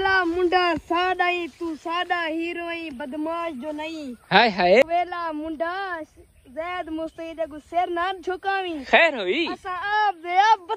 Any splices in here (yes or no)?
yes